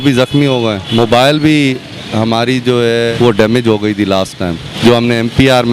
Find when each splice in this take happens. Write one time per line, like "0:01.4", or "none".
0:00.8
0:03.1
0:04.7